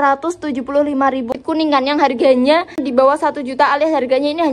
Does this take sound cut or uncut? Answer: cut